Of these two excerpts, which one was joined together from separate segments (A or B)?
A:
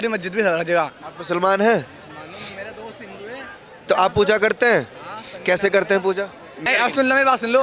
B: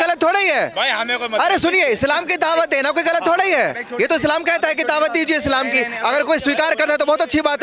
A